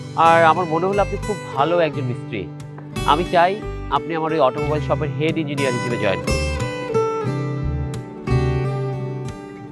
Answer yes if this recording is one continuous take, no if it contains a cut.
yes